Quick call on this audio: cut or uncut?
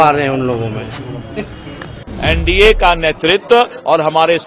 cut